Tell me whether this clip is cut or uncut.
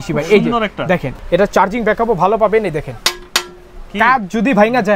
cut